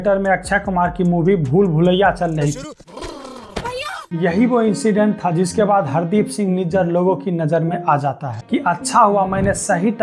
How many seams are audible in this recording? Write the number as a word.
three